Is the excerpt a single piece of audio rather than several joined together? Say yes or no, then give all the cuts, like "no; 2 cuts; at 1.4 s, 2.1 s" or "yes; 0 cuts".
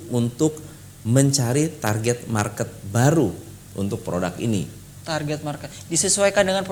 yes; 0 cuts